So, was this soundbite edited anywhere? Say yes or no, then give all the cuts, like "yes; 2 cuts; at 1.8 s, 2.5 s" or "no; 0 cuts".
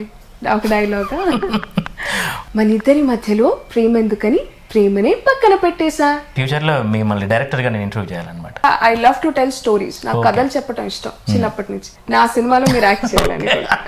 yes; 4 cuts; at 2.4 s, 6.3 s, 8.6 s, 11.9 s